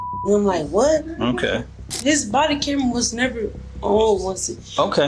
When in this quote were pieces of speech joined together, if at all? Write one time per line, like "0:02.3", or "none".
0:02.0